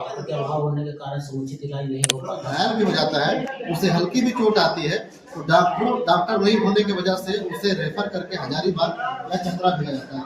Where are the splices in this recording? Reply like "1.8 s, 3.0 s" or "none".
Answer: 2.5 s